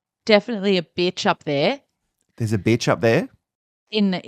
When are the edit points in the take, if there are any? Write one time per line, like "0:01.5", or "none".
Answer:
0:03.2